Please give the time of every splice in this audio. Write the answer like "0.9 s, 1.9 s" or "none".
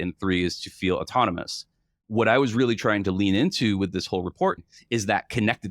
4.6 s